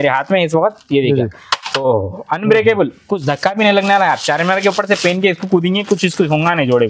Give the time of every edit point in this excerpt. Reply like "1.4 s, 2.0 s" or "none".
none